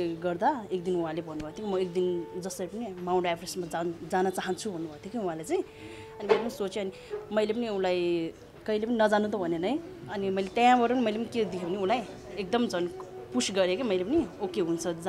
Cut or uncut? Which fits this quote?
uncut